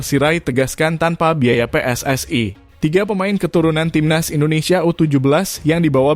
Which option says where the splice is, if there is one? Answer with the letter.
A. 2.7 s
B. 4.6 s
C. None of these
A